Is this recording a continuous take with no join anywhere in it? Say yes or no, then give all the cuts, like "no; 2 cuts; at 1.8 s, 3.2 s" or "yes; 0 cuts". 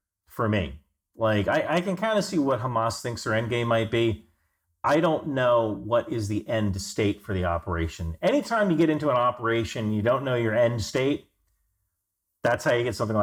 yes; 0 cuts